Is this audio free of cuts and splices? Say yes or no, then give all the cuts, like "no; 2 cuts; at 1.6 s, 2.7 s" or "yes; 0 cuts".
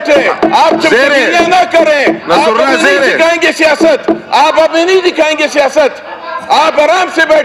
yes; 0 cuts